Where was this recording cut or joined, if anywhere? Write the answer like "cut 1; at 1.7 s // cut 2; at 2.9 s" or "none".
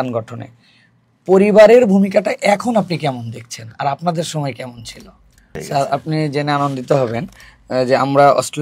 cut 1; at 5.6 s